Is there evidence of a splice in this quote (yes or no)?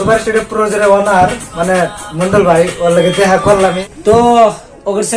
yes